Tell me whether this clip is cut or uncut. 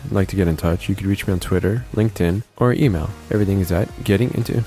uncut